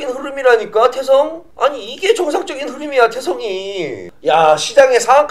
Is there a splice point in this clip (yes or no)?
yes